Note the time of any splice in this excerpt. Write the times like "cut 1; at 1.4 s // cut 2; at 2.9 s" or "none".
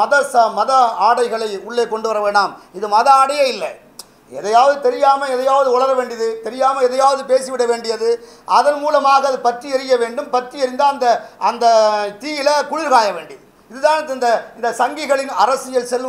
none